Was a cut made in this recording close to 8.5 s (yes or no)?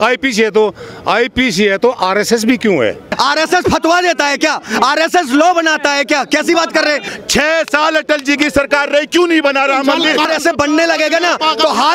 no